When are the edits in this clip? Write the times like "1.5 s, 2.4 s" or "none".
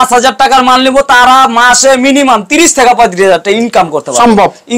none